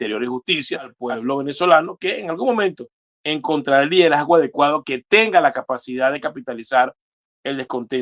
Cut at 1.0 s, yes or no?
yes